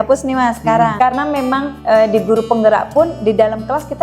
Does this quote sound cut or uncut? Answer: cut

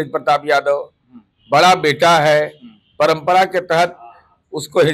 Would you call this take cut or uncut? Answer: uncut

